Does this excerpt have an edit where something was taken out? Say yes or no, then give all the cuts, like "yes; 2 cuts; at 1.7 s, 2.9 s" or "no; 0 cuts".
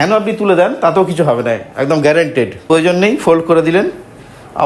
yes; 1 cut; at 2.6 s